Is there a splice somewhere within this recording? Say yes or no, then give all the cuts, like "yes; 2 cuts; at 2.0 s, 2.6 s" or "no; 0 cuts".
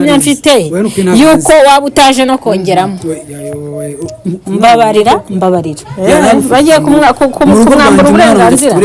yes; 1 cut; at 5.8 s